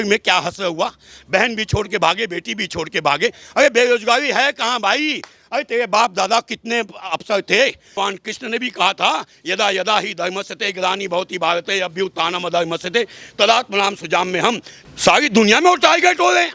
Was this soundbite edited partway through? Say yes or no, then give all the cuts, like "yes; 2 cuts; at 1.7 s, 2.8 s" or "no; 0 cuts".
yes; 2 cuts; at 7.9 s, 14.7 s